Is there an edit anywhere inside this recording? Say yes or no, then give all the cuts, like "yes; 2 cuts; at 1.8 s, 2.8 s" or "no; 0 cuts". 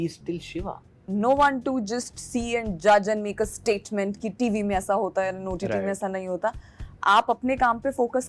yes; 1 cut; at 1.0 s